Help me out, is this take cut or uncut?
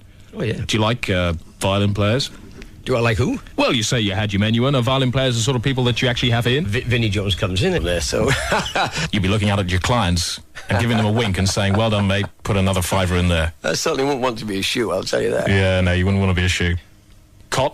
uncut